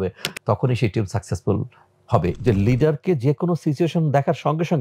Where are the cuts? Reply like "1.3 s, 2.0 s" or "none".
2.3 s